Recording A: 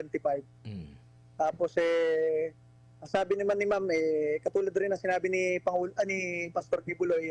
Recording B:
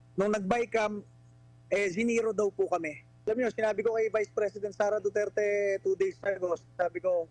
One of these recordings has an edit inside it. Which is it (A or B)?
B